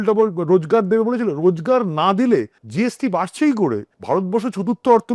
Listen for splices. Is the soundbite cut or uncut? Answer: cut